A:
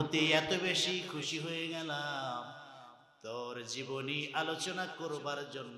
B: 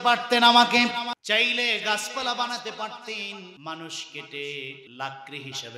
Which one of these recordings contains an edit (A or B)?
B